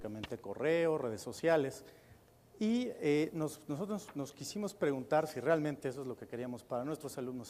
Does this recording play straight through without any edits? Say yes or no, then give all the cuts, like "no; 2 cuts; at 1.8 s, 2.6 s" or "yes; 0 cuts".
no; 1 cut; at 5.8 s